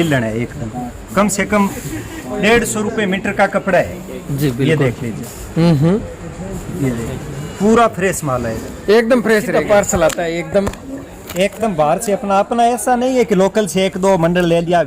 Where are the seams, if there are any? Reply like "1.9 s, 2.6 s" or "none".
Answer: 9.6 s